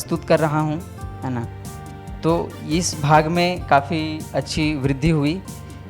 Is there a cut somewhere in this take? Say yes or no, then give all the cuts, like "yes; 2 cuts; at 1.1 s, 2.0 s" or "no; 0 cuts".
no; 0 cuts